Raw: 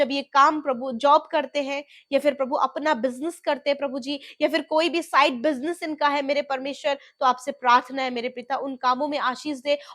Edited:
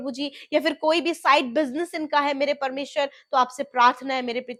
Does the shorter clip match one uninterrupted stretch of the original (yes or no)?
yes